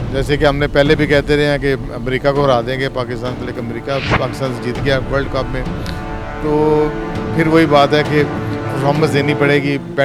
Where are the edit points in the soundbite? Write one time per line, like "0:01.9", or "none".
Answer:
none